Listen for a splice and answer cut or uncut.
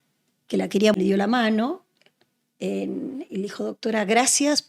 cut